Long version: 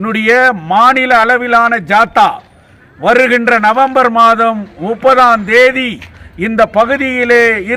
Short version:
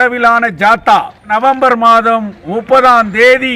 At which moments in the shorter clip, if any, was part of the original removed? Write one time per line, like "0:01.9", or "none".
0:01.3